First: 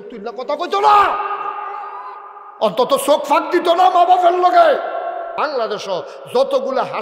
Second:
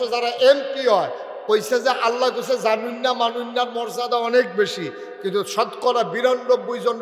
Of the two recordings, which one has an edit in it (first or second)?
first